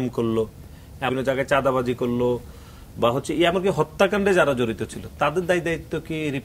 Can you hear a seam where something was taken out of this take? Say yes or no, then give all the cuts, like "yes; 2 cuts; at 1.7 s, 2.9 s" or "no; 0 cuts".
yes; 1 cut; at 1.1 s